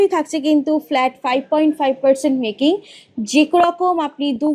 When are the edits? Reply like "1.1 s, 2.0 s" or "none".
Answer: none